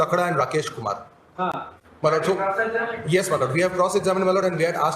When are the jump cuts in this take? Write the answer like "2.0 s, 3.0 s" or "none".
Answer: none